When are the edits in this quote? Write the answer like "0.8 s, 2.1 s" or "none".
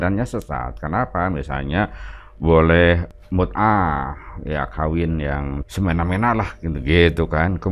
3.1 s, 5.6 s